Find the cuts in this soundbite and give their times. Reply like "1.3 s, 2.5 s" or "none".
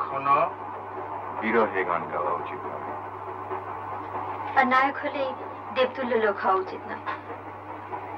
none